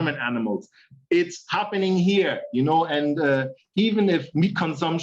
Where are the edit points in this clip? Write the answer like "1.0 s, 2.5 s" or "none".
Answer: 3.6 s